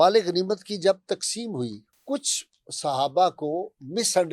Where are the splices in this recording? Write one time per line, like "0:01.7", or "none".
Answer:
0:01.9